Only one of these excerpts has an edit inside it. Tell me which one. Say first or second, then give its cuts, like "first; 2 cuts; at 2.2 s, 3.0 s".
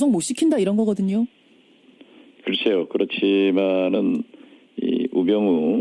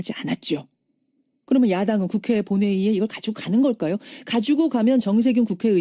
second; 1 cut; at 2.5 s